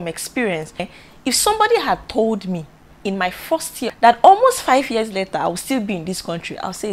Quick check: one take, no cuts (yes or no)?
no